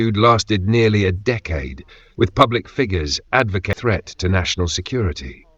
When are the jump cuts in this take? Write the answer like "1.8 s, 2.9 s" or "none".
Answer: 3.7 s